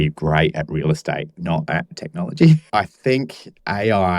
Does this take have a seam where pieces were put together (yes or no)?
yes